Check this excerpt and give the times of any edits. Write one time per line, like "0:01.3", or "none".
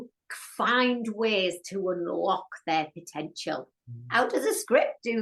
none